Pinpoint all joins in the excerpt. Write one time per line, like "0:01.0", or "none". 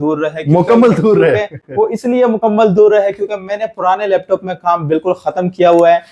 none